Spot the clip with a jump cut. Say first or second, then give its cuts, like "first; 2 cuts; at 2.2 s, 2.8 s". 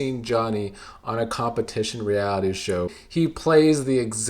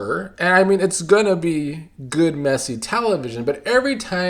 first; 1 cut; at 3.0 s